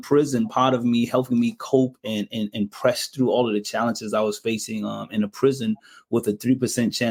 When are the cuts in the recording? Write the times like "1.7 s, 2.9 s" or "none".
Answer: none